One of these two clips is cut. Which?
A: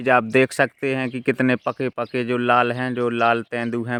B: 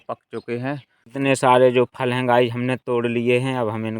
B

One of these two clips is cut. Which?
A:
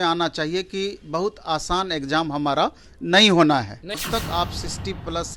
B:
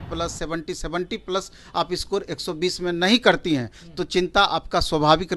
A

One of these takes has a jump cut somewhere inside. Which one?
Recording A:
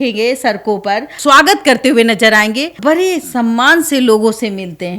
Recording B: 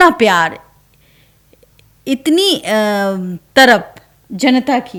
A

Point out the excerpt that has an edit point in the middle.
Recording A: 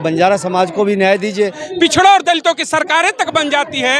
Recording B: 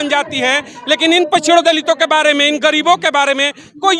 A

